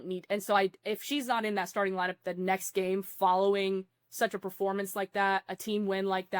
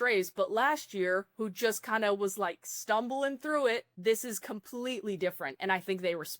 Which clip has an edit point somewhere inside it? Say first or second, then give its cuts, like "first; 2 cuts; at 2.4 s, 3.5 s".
second; 1 cut; at 3.9 s